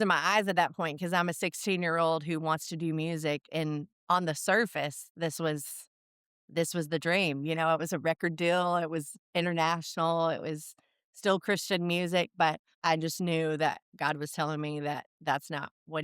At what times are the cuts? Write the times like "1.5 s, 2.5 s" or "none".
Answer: 12.7 s